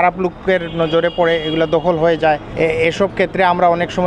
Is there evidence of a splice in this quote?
yes; 1 cut; at 2.5 s

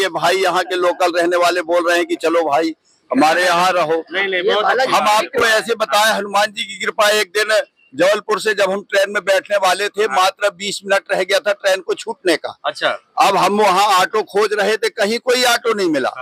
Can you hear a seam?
no; 0 cuts

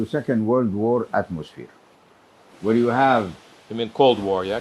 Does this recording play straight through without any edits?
yes; 0 cuts

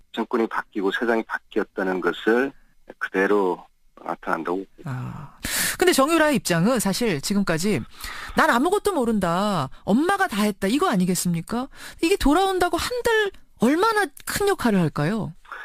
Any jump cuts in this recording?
no; 0 cuts

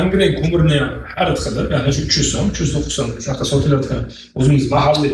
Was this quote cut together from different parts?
no; 0 cuts

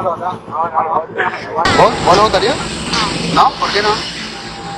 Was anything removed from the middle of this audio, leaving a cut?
yes; 1 cut; at 1.6 s

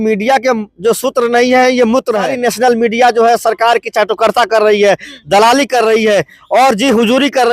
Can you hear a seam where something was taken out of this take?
yes; 1 cut; at 2.3 s

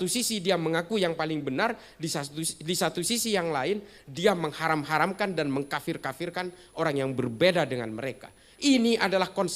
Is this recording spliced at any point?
no; 0 cuts

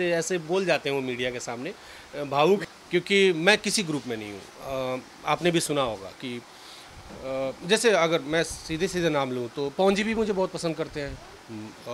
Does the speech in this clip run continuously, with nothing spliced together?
no; 1 cut; at 2.6 s

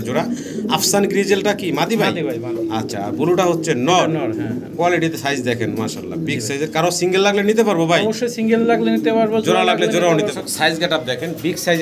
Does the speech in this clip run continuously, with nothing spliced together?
no; 1 cut; at 10.3 s

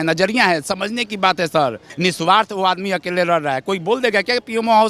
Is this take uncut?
no; 1 cut; at 1.9 s

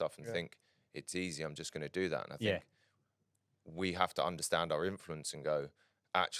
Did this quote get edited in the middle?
no; 0 cuts

